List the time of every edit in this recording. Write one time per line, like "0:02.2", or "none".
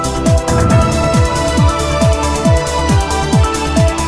none